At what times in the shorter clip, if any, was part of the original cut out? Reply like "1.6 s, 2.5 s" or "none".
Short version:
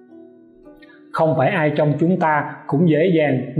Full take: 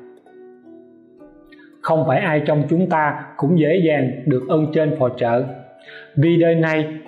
1.1 s